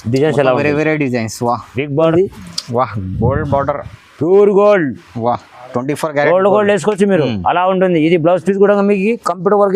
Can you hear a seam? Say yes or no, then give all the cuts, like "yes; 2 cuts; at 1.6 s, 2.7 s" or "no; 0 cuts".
yes; 1 cut; at 2.1 s